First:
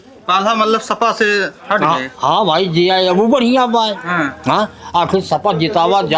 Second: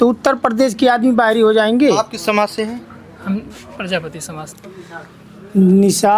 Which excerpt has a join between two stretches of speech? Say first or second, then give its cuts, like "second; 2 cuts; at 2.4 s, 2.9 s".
second; 1 cut; at 4.4 s